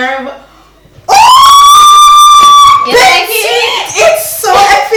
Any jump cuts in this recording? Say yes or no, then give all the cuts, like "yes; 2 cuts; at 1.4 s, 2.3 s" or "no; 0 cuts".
no; 0 cuts